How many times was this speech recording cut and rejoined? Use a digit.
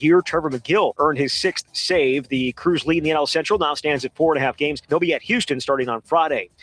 2